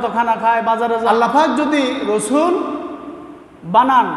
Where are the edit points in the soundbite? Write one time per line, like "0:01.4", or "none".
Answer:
0:01.0